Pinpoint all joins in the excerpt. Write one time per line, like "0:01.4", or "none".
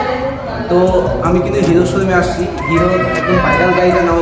none